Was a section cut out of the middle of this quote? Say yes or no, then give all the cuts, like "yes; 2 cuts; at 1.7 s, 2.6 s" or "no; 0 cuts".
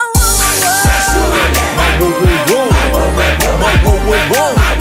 no; 0 cuts